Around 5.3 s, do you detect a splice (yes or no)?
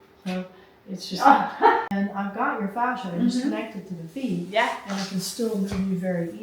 no